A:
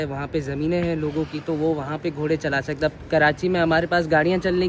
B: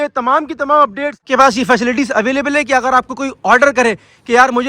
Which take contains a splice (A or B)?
B